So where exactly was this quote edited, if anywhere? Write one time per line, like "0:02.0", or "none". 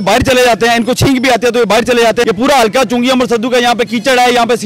0:02.2